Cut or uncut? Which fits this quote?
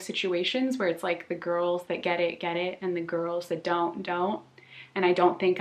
uncut